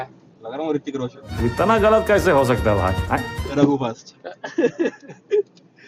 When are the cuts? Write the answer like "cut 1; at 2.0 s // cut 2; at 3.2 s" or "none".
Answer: none